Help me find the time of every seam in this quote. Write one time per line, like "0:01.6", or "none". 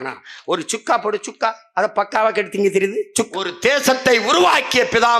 0:03.3